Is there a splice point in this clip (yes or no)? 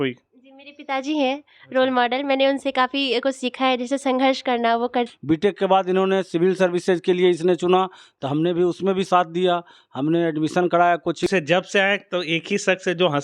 yes